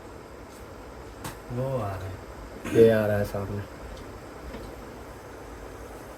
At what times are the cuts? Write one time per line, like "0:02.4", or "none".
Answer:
none